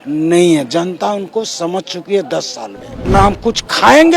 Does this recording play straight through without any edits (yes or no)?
no